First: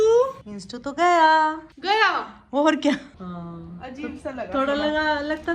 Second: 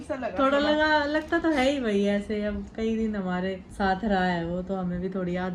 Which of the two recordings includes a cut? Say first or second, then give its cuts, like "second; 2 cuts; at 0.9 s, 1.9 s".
first; 1 cut; at 3.1 s